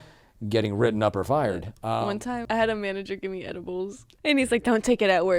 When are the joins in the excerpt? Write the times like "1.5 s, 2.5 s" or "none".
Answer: 1.8 s, 4.1 s